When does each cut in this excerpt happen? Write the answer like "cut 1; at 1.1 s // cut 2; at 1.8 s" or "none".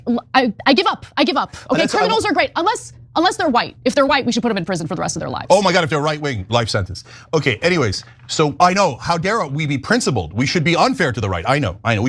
none